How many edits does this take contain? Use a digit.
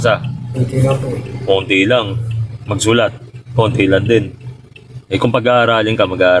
0